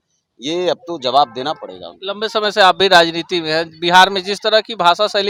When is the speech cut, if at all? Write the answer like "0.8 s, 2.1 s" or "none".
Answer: none